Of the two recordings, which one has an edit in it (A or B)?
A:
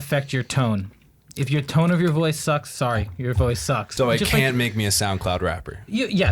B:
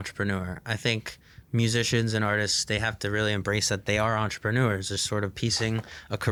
A